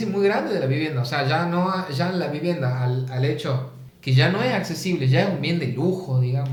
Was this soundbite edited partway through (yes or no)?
no